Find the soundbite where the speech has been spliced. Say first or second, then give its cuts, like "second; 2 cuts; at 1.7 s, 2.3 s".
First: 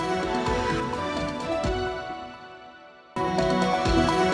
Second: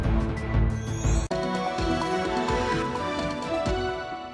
first; 1 cut; at 3.3 s